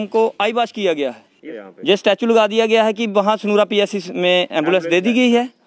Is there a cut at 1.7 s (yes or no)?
yes